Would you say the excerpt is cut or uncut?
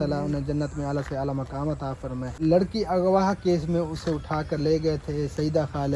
cut